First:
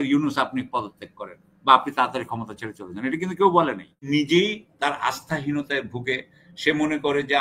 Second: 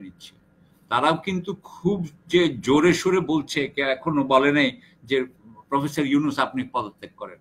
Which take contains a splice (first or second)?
first